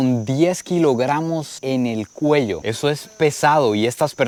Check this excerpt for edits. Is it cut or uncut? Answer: uncut